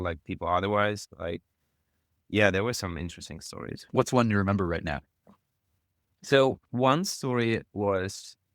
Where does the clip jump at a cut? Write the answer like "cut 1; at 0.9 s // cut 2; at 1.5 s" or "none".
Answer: none